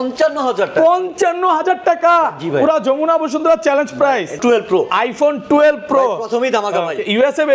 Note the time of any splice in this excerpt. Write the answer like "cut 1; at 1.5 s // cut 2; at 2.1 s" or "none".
cut 1; at 4.4 s